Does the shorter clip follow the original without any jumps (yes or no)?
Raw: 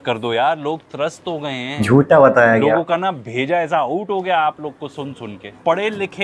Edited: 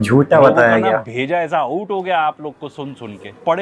no